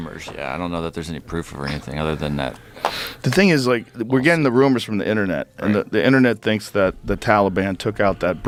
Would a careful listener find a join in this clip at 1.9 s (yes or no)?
no